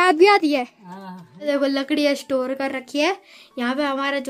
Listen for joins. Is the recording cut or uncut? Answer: cut